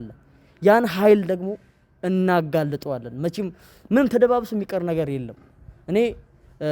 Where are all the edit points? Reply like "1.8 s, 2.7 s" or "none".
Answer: none